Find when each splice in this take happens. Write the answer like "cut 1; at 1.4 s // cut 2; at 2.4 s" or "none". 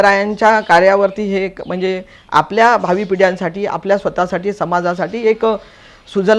none